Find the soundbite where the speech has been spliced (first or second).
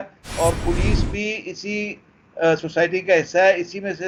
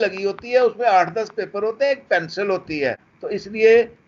second